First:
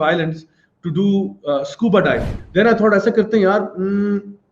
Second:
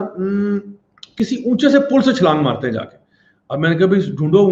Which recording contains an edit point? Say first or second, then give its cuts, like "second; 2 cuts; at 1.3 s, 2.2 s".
first; 1 cut; at 2.4 s